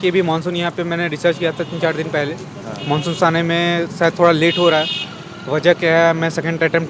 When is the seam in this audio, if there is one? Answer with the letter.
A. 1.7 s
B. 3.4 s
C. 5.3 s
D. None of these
D